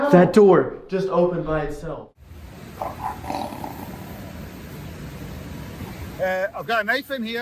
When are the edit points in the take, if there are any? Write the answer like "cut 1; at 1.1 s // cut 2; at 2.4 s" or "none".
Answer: cut 1; at 1.8 s // cut 2; at 5.8 s